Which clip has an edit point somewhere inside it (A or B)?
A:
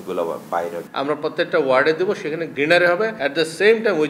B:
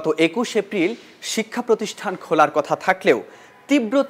A